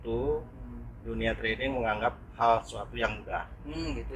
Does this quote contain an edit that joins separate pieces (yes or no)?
no